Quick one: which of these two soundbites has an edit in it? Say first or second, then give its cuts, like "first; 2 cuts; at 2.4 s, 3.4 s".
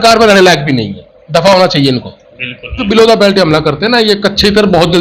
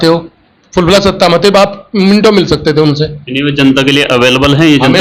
first; 1 cut; at 2.8 s